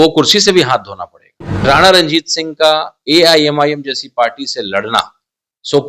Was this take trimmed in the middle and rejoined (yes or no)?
yes